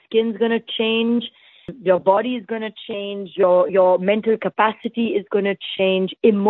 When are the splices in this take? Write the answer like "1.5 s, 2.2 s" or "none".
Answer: 1.7 s

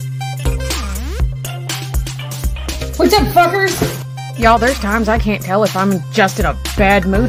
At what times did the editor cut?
none

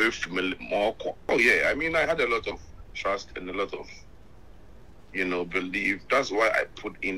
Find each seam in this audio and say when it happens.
1.2 s

